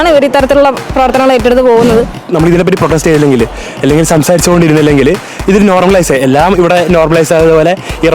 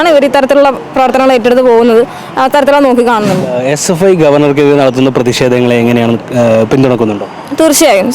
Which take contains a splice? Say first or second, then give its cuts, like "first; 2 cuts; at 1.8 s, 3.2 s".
first; 1 cut; at 2.2 s